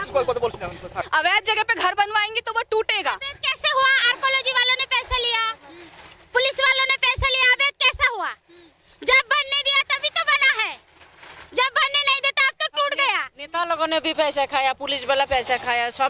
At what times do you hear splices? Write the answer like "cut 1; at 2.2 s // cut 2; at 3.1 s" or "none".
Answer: cut 1; at 1.0 s